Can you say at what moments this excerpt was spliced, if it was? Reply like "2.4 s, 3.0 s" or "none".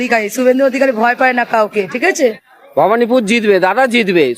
2.1 s